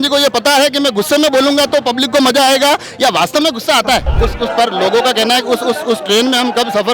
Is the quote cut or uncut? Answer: cut